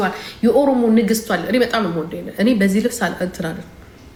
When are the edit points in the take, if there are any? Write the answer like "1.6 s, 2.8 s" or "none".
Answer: none